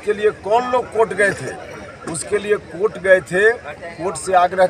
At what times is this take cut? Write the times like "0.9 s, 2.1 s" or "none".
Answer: none